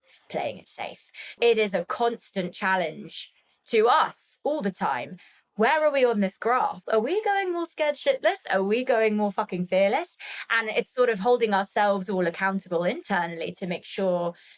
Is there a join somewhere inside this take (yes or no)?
yes